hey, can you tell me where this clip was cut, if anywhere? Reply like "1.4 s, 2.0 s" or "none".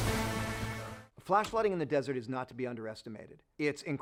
none